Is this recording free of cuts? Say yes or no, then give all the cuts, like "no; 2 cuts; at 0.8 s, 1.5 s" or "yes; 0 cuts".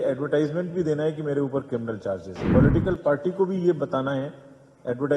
no; 1 cut; at 2.3 s